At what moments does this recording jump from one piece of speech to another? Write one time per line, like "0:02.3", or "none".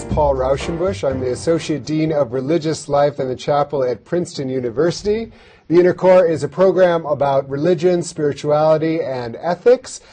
none